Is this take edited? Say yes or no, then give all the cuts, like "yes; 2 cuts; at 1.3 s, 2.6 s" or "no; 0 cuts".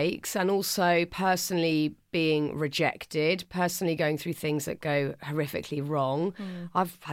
no; 0 cuts